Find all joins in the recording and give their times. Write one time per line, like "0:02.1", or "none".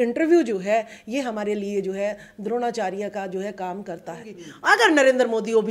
0:04.5

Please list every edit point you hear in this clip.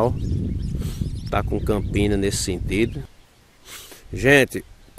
0:03.1

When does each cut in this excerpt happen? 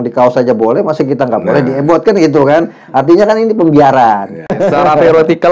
0:04.6

